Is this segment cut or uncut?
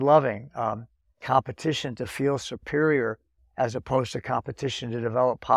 uncut